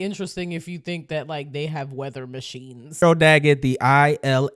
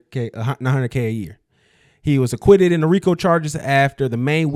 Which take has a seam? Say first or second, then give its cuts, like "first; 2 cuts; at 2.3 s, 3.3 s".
first; 1 cut; at 3.0 s